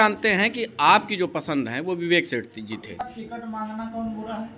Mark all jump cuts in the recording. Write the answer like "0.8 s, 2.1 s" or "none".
3.1 s